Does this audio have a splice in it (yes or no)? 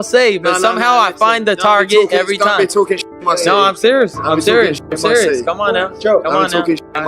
yes